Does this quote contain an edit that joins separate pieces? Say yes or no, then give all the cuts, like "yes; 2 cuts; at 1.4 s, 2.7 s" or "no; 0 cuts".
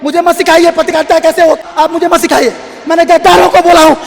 yes; 1 cut; at 1.6 s